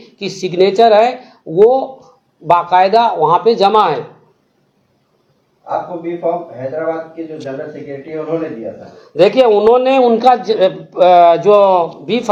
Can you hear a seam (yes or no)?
no